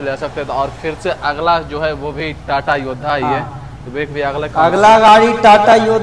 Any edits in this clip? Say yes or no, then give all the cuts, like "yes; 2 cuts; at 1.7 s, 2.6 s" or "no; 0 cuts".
no; 0 cuts